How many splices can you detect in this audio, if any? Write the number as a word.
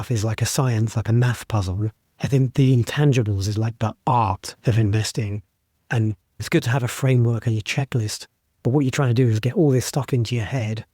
two